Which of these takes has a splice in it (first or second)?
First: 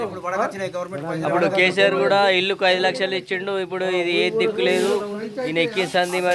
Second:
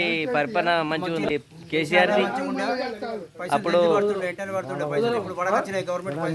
second